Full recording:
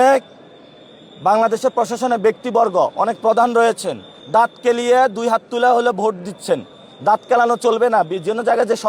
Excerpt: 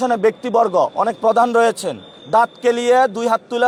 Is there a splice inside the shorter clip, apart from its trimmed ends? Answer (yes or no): no